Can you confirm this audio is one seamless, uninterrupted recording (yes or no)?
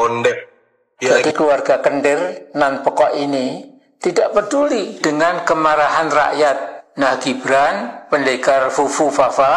no